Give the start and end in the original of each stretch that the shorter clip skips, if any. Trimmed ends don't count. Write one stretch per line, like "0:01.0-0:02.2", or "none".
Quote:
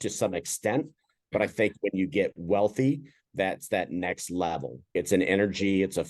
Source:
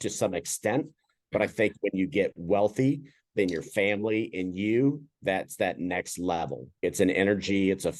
0:03.2-0:05.1